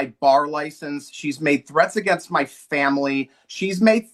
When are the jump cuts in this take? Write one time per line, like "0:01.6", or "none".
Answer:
none